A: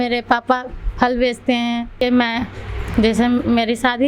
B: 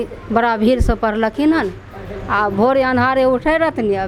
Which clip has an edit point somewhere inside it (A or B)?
A